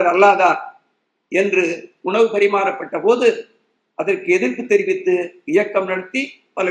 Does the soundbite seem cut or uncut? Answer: uncut